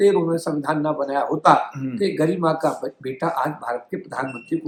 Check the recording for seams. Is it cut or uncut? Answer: uncut